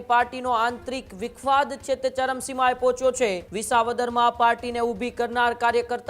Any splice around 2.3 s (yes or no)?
no